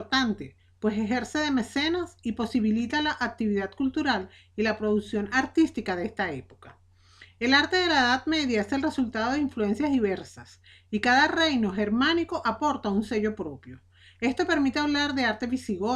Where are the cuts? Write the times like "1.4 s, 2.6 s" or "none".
7.9 s